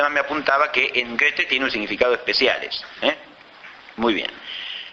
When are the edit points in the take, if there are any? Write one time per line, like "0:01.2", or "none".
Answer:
0:02.9